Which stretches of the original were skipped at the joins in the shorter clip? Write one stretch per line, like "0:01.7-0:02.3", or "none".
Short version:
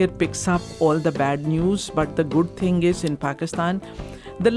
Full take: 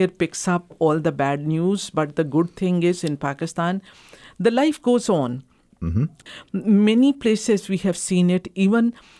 none